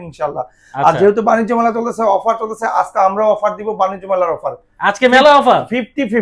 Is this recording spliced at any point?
no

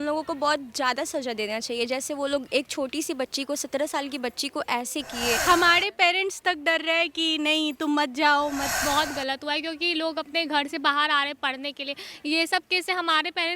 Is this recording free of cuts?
no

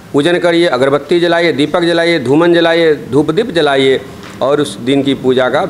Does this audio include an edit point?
no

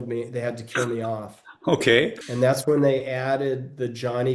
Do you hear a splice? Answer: yes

